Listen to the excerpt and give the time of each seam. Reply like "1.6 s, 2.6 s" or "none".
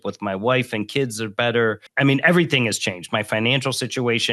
1.9 s